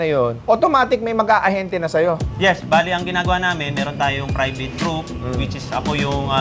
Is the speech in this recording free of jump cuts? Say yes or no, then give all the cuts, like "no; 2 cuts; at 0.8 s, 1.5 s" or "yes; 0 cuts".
yes; 0 cuts